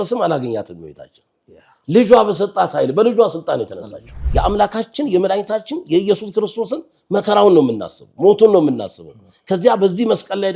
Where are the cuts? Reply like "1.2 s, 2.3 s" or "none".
4.1 s